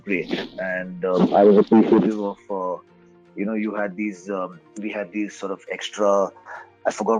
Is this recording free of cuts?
yes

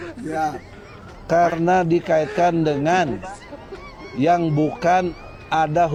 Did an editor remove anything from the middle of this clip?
no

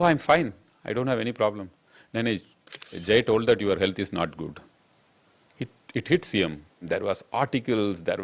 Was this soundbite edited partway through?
yes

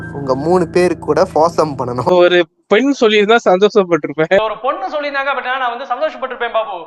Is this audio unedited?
no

